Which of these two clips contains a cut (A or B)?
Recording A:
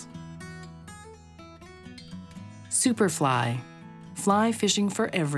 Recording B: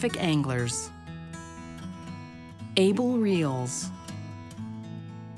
B